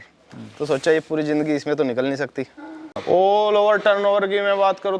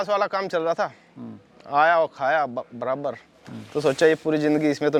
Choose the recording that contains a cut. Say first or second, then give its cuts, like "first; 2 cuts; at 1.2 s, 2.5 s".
first; 1 cut; at 3.0 s